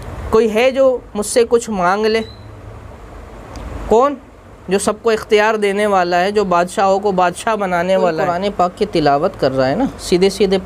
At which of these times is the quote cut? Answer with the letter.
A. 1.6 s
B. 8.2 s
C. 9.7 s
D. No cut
B